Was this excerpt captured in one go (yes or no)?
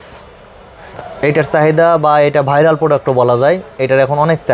yes